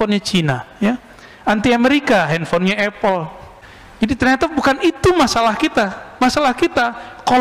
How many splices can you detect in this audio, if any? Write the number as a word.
zero